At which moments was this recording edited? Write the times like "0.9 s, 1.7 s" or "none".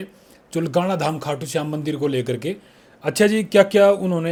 none